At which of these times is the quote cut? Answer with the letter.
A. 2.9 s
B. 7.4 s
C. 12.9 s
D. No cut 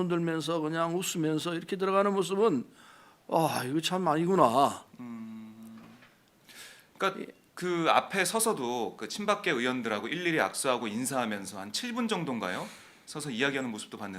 A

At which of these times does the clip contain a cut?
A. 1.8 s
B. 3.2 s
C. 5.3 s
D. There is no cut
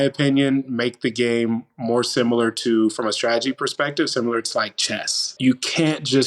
C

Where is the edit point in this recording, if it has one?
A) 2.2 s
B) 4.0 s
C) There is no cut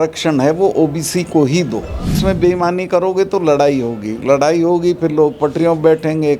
A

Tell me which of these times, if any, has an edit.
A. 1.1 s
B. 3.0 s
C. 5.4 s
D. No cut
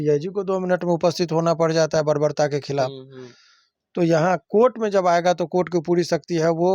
D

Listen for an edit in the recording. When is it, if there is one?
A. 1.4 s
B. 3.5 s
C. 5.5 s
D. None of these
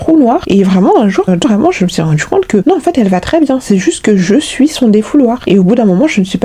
A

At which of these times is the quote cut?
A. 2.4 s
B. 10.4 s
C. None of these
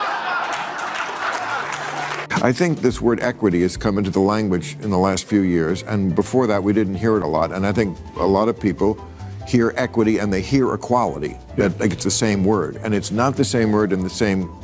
A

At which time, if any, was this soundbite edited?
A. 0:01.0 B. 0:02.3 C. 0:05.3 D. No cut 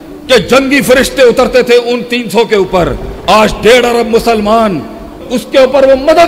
C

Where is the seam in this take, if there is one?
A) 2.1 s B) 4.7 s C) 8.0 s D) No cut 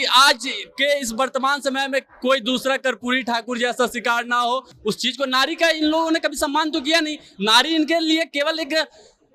B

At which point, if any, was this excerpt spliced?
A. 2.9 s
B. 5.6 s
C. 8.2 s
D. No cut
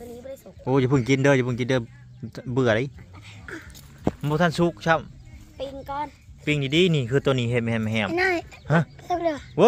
D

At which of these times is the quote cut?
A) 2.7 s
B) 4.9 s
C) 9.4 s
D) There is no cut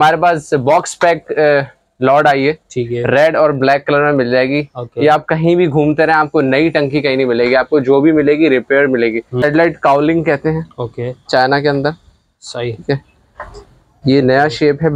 C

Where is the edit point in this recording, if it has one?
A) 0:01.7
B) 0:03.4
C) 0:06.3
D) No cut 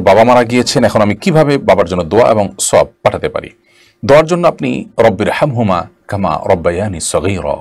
D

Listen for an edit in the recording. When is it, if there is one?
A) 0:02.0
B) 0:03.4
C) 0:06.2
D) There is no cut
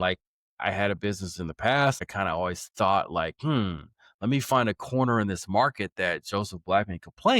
A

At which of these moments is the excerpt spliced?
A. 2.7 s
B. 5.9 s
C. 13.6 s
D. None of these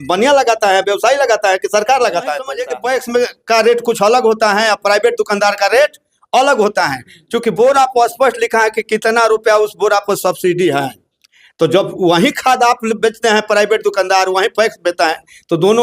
A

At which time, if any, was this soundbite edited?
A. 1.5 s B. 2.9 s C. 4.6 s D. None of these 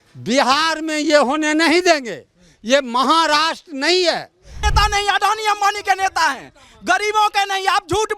C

